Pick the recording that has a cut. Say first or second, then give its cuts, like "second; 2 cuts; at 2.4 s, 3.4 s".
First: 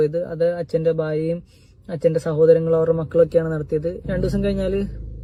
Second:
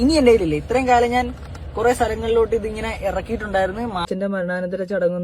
second; 1 cut; at 4.1 s